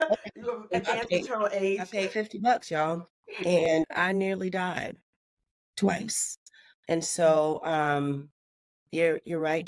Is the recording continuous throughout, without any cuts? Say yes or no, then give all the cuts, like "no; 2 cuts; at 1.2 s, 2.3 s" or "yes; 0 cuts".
no; 2 cuts; at 1.9 s, 3.7 s